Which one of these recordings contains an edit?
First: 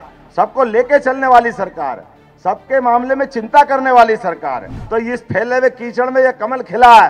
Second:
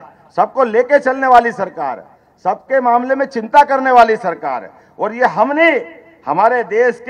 first; 1 cut; at 4.7 s

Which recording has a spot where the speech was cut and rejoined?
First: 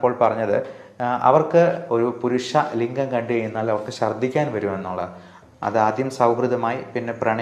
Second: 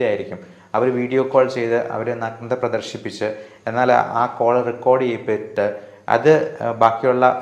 first; 2 cuts; at 1.8 s, 5.3 s

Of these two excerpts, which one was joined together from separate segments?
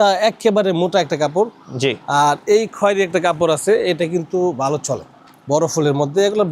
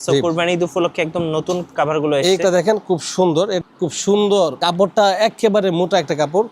second; 1 cut; at 3.6 s

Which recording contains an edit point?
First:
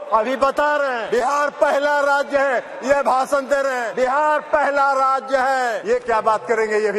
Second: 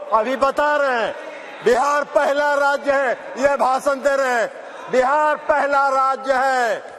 first; 3 cuts; at 1.0 s, 3.8 s, 5.8 s

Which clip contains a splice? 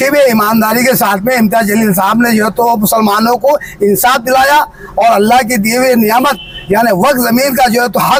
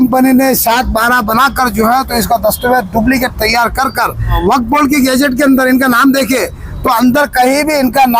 second; 1 cut; at 4.4 s

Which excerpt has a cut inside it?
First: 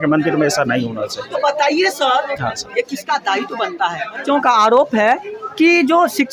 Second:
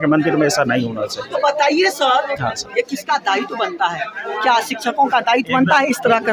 first; 1 cut; at 4.2 s

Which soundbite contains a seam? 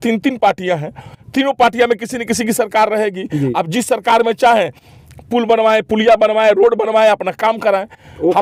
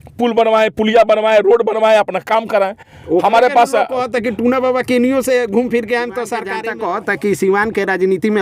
second; 1 cut; at 6.5 s

